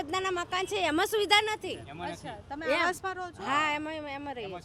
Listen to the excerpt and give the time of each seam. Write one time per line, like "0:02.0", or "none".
none